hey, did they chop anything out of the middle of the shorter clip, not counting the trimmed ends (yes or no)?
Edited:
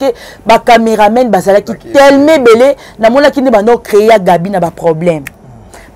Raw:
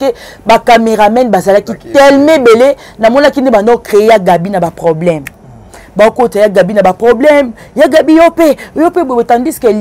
no